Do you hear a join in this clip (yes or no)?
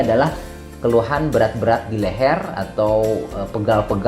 no